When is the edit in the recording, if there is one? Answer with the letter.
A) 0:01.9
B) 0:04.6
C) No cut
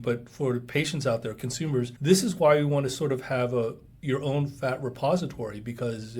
A